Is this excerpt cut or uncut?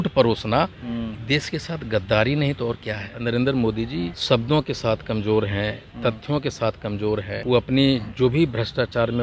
cut